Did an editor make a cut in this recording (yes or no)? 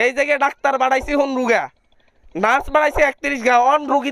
no